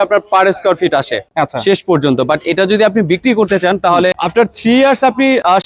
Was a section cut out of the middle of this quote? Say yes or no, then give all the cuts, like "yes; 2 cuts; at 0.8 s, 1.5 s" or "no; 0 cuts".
no; 0 cuts